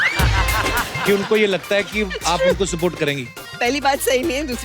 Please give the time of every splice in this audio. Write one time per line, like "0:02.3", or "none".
0:03.4